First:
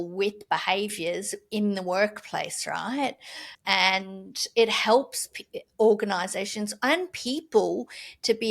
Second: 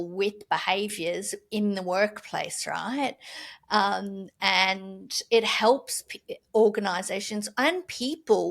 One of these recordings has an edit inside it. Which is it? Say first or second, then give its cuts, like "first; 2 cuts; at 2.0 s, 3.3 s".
first; 1 cut; at 3.5 s